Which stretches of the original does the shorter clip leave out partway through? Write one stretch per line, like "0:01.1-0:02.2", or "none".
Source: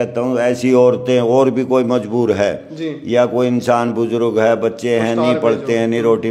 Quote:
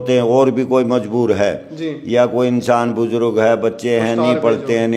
none